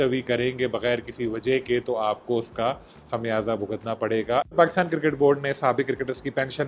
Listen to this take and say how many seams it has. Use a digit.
1